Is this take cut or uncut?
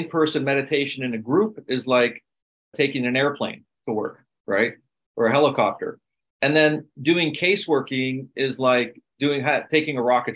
cut